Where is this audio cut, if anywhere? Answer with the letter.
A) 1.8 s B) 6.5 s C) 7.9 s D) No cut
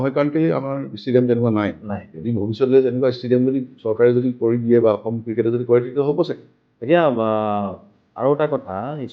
B